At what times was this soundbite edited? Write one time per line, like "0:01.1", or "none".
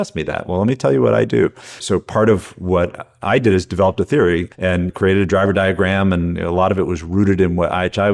0:01.8
0:04.7